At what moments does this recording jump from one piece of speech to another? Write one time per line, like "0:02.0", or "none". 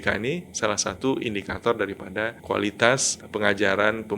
0:02.4
0:03.2